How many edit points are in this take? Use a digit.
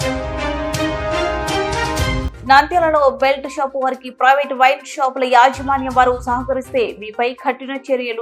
1